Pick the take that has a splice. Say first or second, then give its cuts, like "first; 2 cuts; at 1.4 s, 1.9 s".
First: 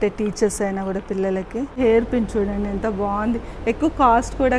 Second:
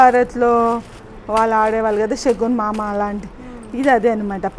first; 1 cut; at 1.8 s